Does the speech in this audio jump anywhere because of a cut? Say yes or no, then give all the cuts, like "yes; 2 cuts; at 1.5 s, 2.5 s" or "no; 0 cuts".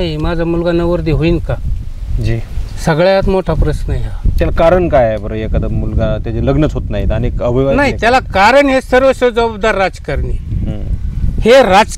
no; 0 cuts